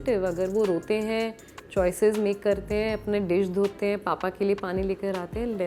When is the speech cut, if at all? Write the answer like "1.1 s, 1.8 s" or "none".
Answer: none

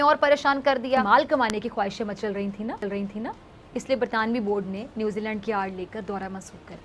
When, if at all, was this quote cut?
none

